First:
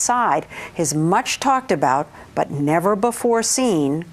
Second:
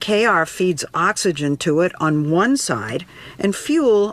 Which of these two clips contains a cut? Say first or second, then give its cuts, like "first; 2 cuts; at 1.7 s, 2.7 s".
first; 1 cut; at 1.4 s